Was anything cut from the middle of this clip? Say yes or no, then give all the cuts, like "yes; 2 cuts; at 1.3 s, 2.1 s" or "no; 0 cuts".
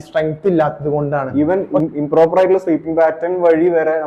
yes; 1 cut; at 1.2 s